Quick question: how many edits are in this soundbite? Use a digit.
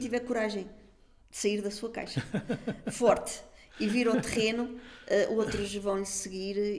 0